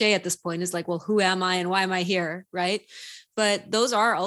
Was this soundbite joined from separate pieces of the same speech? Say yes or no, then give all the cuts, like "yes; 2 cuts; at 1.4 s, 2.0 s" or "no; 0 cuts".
no; 0 cuts